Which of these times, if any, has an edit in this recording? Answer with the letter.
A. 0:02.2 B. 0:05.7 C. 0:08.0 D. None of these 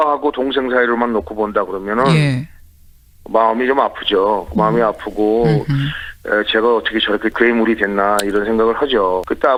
D